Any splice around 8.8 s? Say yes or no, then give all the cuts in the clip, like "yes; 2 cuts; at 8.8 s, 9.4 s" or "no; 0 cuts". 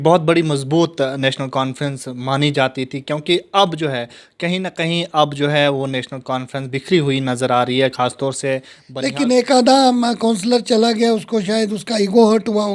yes; 1 cut; at 8.8 s